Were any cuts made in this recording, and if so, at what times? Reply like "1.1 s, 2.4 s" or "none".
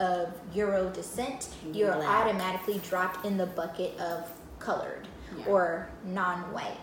none